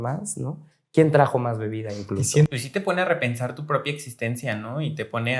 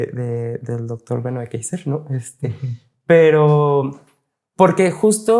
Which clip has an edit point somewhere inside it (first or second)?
first